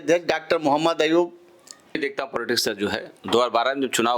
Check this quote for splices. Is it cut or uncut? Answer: cut